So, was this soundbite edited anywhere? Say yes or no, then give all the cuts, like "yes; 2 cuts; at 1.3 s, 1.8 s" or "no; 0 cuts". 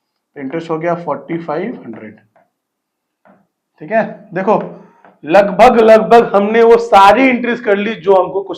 no; 0 cuts